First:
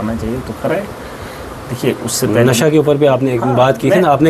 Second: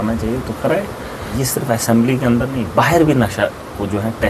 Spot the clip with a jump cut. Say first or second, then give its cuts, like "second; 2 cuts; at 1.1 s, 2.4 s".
second; 1 cut; at 1.2 s